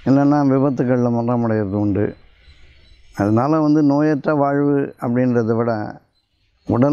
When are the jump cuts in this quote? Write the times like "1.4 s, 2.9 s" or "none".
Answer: none